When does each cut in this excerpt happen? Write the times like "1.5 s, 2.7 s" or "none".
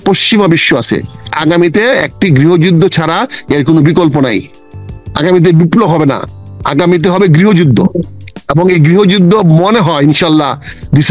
1.3 s